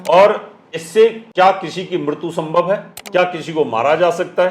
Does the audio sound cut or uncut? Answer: cut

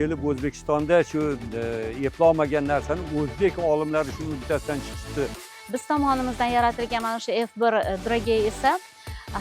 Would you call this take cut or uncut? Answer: cut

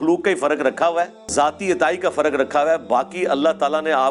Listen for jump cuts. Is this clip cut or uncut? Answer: uncut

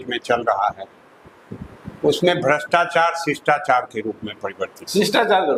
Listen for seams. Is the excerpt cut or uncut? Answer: uncut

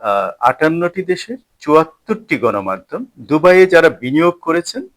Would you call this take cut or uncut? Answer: cut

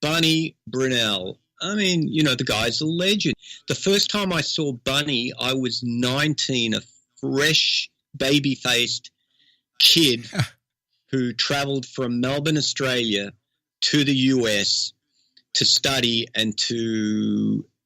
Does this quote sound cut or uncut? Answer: cut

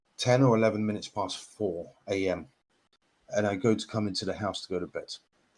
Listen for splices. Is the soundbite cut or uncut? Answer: cut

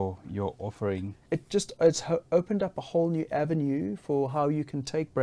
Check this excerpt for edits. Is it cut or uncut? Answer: cut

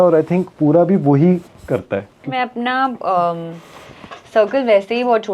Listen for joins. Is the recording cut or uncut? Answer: cut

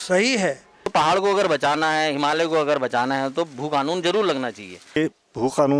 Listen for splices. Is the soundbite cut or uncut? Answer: cut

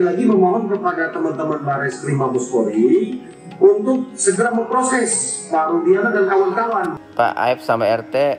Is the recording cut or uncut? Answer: cut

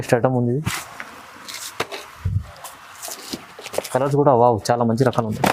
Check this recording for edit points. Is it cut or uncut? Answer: uncut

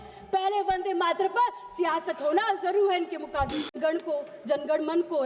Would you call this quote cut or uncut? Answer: cut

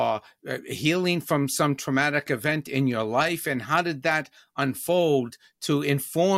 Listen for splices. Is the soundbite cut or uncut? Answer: uncut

